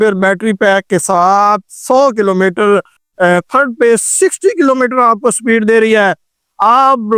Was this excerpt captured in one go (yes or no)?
no